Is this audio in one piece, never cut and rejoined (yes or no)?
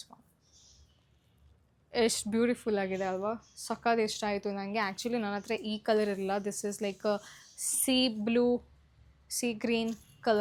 yes